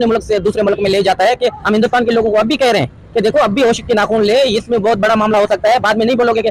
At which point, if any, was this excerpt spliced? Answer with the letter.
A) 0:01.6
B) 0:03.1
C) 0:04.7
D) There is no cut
A